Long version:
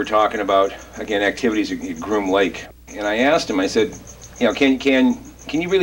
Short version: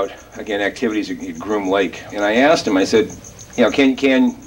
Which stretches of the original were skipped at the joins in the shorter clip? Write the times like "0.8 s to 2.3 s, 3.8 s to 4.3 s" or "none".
2.9 s to 3.1 s